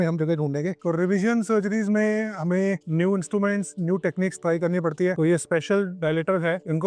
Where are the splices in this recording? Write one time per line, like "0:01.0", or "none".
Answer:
0:00.8
0:05.2